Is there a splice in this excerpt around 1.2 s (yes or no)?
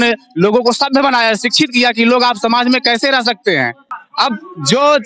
no